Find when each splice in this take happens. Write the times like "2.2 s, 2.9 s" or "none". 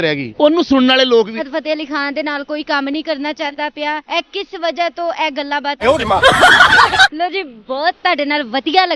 1.4 s, 5.8 s

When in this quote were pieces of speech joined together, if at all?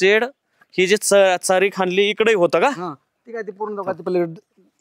none

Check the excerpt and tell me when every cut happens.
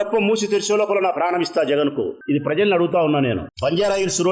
2.2 s

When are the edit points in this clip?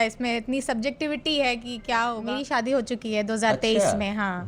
2.4 s

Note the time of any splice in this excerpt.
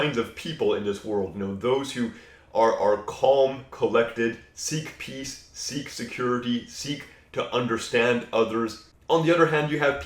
8.9 s

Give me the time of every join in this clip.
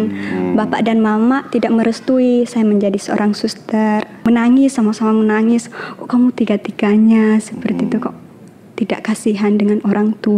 4.3 s

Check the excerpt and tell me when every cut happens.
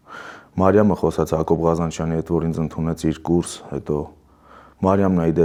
none

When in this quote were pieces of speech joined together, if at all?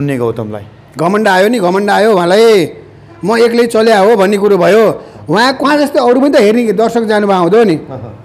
5.6 s

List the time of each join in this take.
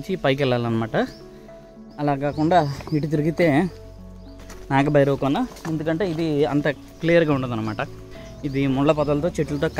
6.8 s

